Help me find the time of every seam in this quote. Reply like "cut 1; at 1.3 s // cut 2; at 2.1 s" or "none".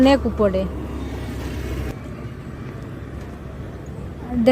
cut 1; at 1.8 s